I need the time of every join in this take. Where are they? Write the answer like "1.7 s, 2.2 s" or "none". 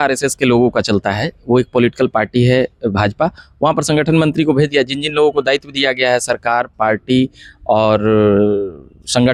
none